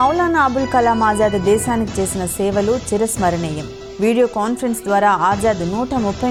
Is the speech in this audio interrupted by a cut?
no; 0 cuts

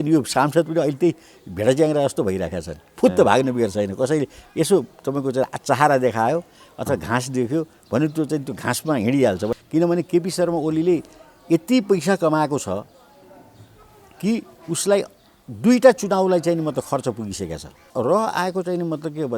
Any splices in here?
yes; 2 cuts; at 9.5 s, 17.9 s

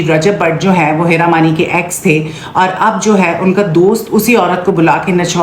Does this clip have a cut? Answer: no; 0 cuts

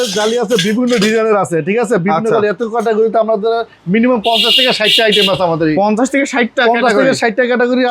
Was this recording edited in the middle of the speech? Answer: no; 0 cuts

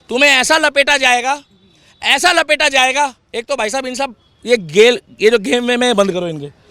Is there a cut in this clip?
no; 0 cuts

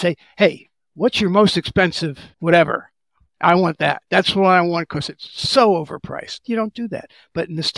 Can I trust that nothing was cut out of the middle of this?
no; 2 cuts; at 2.3 s, 6.4 s

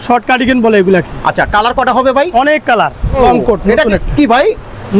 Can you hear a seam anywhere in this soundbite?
yes; 1 cut; at 3.2 s

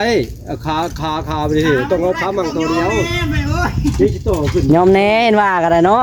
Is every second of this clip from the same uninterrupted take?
yes; 0 cuts

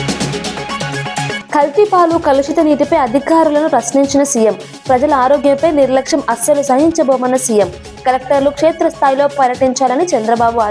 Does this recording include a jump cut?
yes; 1 cut; at 1.4 s

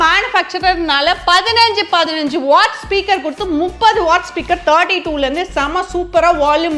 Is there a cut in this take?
no; 0 cuts

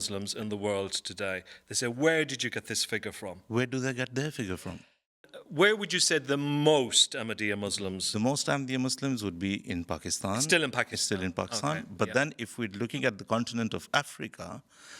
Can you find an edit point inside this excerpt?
no; 0 cuts

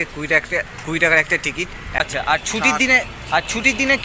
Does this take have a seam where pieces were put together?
yes; 1 cut; at 2.0 s

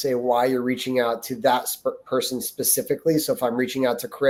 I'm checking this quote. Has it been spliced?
no; 0 cuts

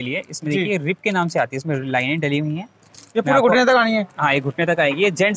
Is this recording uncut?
yes; 0 cuts

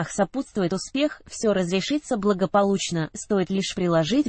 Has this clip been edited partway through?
no; 0 cuts

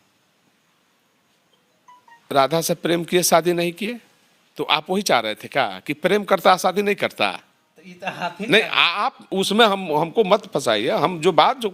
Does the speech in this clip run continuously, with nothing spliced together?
no; 1 cut; at 9.3 s

